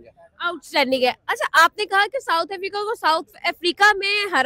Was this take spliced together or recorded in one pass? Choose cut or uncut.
uncut